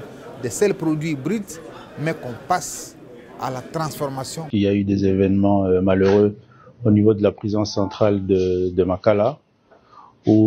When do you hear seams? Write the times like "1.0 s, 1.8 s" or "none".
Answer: 4.4 s